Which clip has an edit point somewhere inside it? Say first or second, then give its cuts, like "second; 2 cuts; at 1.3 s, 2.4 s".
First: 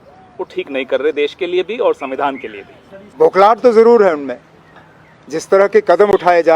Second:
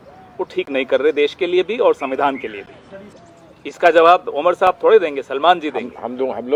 first; 1 cut; at 3.1 s